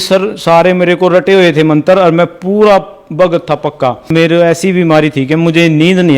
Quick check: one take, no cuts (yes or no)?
no